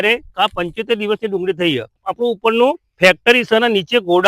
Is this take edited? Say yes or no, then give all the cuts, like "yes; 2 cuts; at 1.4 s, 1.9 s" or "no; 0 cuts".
yes; 1 cut; at 2.1 s